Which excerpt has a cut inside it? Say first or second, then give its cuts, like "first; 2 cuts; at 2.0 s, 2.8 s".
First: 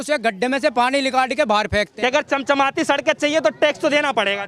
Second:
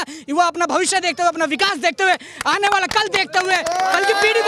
first; 1 cut; at 1.9 s